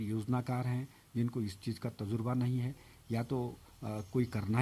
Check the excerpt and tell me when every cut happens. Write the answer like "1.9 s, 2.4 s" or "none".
none